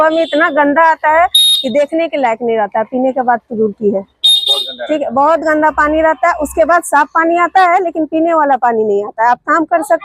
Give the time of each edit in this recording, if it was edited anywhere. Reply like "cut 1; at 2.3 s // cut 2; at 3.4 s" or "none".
none